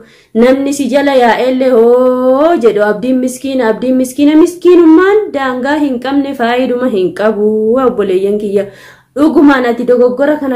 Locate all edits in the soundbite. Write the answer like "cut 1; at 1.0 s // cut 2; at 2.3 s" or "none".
none